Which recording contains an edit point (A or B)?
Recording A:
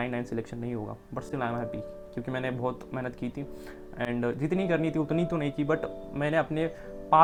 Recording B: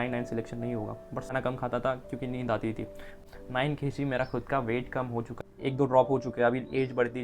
B